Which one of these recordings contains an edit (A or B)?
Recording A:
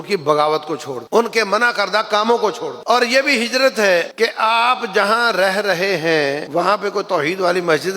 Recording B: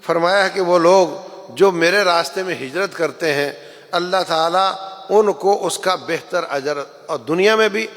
A